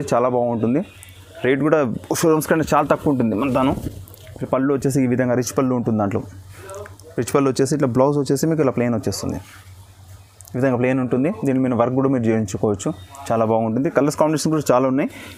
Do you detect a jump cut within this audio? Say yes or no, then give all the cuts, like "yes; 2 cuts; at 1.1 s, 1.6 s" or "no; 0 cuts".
no; 0 cuts